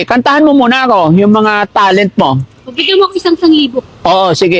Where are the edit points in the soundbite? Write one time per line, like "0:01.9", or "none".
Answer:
none